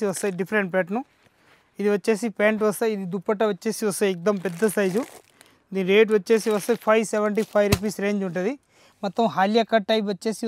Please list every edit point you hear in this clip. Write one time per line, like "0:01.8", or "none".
none